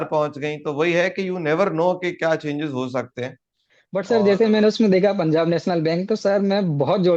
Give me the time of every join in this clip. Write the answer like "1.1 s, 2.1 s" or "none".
3.8 s